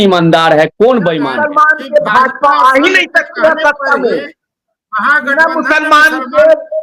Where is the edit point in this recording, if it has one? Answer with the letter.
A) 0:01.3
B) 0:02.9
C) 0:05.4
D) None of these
A